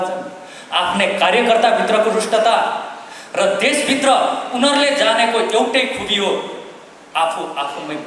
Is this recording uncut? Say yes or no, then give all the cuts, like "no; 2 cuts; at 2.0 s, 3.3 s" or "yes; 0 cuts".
yes; 0 cuts